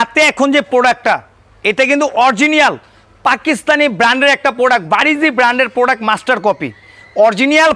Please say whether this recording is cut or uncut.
uncut